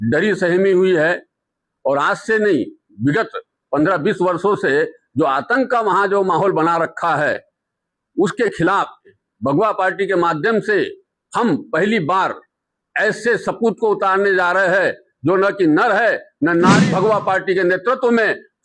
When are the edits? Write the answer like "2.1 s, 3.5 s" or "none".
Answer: 9.2 s, 16.8 s